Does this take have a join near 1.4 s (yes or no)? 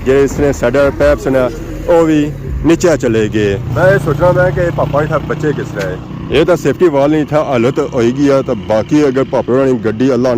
no